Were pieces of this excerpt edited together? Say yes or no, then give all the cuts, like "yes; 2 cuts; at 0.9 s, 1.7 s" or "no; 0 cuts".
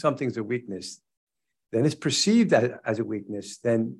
no; 0 cuts